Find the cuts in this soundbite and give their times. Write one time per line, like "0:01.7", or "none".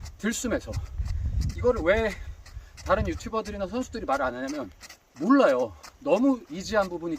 none